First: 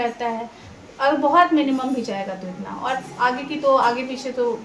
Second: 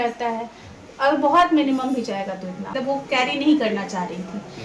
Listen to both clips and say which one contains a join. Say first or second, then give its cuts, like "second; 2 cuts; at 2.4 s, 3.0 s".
second; 1 cut; at 2.7 s